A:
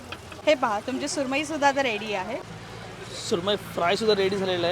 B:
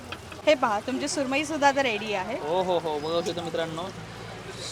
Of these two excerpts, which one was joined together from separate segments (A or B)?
A